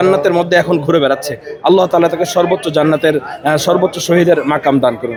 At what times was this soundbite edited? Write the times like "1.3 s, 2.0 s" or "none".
none